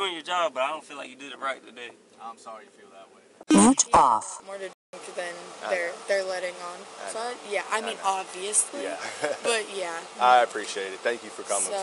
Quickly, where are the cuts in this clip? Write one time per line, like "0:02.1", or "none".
0:03.3